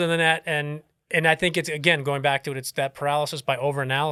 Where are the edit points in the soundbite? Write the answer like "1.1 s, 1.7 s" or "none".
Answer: none